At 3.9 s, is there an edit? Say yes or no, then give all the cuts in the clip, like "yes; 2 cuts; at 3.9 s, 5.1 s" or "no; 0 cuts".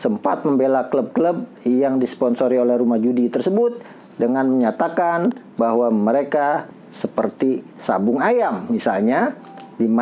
no; 1 cut; at 6.7 s